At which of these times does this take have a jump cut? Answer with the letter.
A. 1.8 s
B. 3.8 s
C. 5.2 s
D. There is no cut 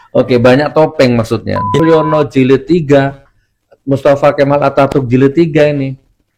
A